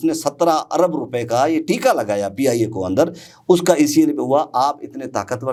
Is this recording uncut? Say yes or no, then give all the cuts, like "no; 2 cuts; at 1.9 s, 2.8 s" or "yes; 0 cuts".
yes; 0 cuts